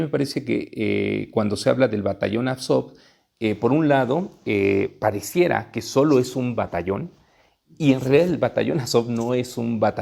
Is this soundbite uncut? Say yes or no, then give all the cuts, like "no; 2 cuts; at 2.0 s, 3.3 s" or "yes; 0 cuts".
yes; 0 cuts